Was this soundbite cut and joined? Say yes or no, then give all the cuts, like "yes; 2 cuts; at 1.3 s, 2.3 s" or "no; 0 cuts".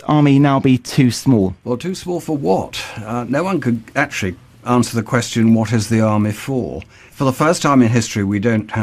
yes; 1 cut; at 2.2 s